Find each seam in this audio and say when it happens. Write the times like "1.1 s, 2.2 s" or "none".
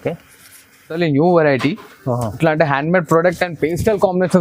1.0 s